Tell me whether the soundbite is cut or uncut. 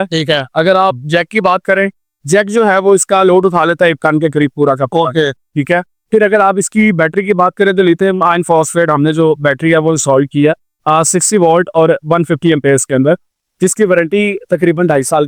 uncut